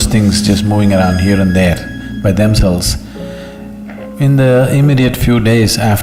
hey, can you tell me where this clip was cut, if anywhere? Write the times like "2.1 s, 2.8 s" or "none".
none